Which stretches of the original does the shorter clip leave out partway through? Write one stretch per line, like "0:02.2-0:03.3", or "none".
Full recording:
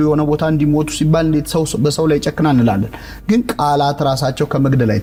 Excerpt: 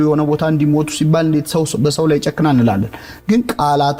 none

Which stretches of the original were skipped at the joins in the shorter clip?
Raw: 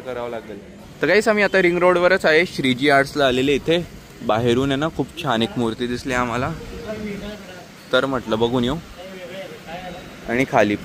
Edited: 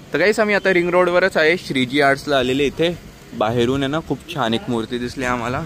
none

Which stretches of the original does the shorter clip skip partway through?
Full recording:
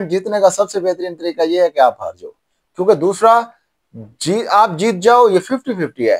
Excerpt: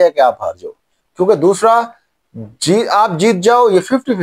none

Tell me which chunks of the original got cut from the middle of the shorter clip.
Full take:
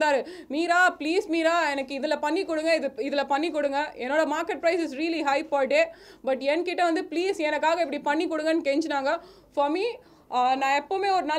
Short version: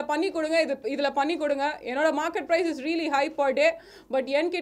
none

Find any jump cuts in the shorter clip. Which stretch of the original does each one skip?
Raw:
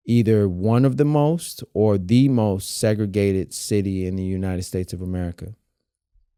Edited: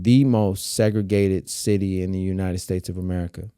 none

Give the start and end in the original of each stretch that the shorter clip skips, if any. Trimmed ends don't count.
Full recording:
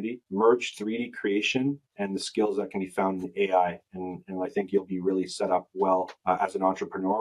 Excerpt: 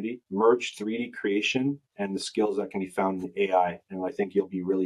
0:03.8-0:04.2

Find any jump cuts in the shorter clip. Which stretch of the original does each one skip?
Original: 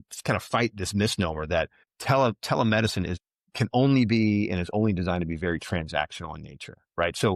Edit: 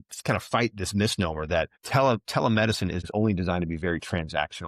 0:01.8-0:01.9
0:03.2-0:04.6

